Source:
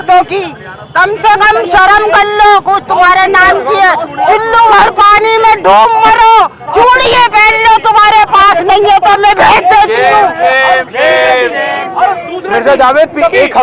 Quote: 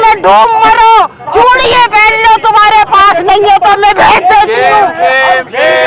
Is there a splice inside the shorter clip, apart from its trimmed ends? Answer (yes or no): no